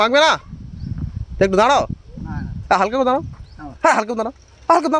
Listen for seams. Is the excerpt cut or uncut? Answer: uncut